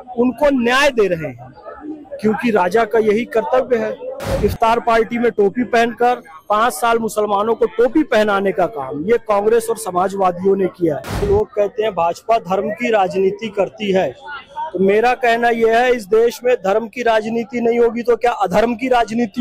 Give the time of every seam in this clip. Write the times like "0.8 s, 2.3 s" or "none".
4.4 s, 11.2 s